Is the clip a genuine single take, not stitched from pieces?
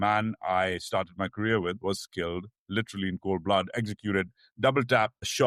yes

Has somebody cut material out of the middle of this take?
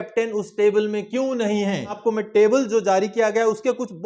yes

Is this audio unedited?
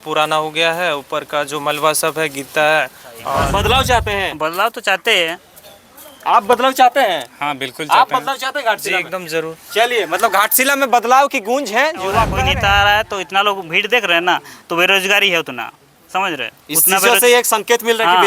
no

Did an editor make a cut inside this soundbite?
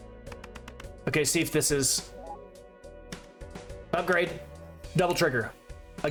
no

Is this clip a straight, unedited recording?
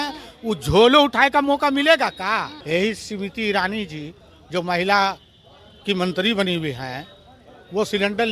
no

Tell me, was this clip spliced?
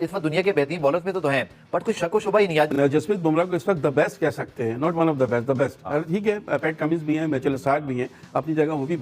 yes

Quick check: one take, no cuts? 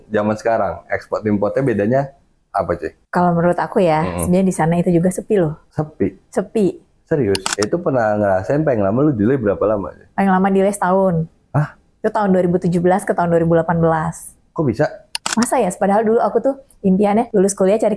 no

